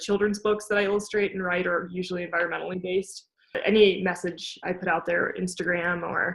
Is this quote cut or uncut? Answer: cut